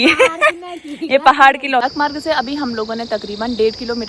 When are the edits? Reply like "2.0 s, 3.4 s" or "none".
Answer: 1.9 s

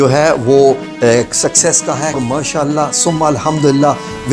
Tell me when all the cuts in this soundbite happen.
2.2 s

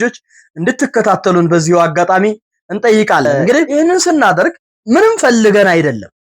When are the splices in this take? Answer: 3.7 s, 4.7 s

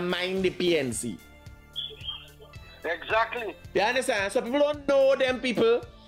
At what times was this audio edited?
none

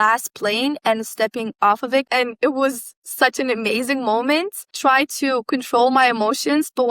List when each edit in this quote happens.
2.1 s, 4.7 s

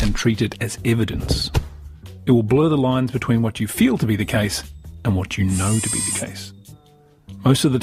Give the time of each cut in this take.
4.7 s

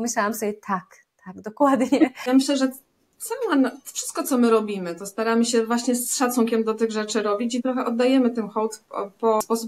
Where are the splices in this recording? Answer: 2.2 s

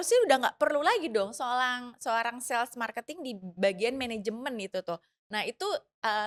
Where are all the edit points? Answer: none

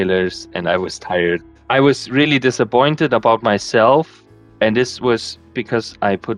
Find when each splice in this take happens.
none

